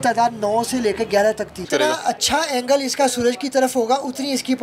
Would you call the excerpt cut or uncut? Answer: cut